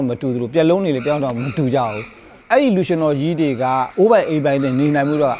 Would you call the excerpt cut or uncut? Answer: cut